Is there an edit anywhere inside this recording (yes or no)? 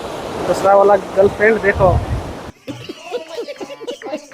yes